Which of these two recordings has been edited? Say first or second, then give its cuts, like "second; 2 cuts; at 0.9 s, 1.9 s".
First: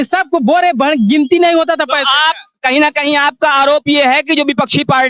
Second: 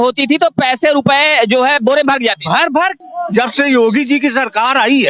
second; 1 cut; at 3.0 s